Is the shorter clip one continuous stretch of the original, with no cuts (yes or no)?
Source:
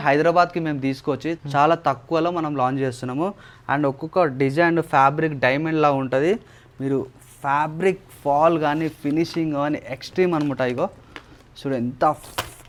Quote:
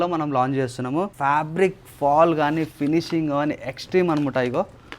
no